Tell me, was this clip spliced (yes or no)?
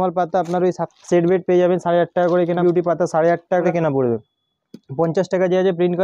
yes